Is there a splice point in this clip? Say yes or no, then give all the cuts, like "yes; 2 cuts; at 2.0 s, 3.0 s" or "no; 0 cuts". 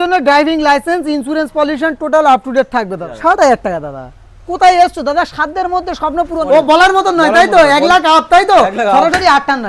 yes; 2 cuts; at 3.0 s, 6.4 s